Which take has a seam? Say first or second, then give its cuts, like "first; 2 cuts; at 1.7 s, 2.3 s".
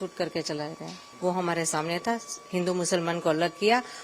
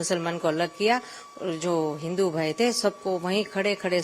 first; 1 cut; at 1.0 s